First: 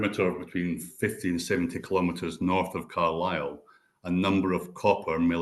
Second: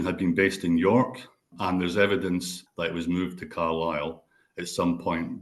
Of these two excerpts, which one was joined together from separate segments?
second; 2 cuts; at 1.5 s, 2.6 s

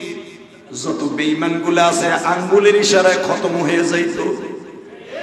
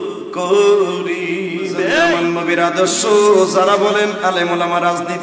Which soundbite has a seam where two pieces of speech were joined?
second; 1 cut; at 1.9 s

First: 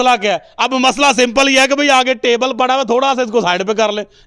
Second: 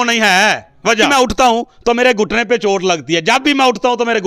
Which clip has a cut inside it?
second; 1 cut; at 1.1 s

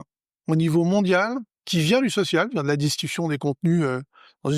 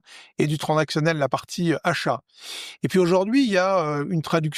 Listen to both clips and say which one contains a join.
first; 1 cut; at 1.5 s

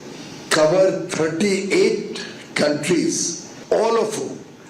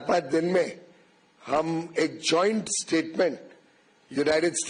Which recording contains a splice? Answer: first; 1 cut; at 3.5 s

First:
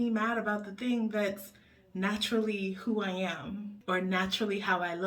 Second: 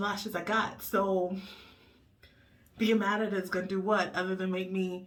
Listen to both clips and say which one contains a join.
first; 1 cut; at 3.7 s

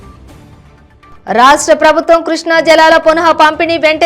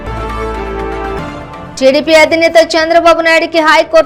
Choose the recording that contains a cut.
first; 1 cut; at 0.9 s

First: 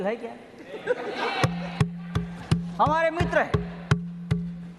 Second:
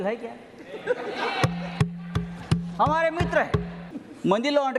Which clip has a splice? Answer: second; 1 cut; at 3.7 s

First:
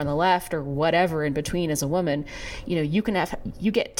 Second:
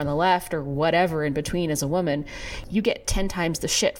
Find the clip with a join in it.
second; 1 cut; at 2.5 s

